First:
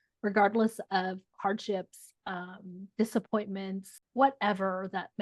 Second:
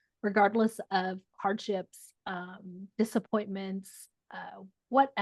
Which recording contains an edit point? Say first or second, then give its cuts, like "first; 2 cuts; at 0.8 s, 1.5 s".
first; 1 cut; at 4.0 s